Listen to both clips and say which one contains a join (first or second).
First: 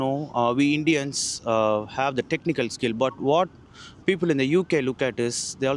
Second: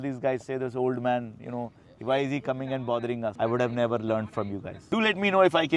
second